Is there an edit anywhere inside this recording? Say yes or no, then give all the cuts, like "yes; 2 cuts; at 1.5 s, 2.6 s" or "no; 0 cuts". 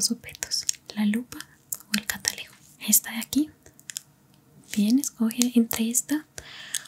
yes; 1 cut; at 2.7 s